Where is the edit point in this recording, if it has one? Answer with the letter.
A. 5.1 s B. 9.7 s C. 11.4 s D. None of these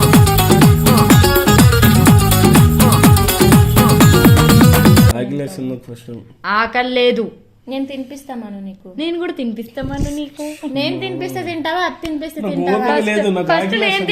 A